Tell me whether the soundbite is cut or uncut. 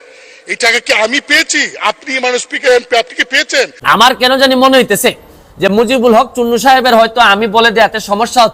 cut